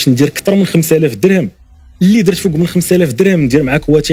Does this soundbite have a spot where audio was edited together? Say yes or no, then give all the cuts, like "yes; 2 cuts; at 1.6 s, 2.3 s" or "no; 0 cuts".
no; 0 cuts